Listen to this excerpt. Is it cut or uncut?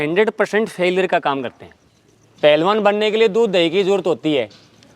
cut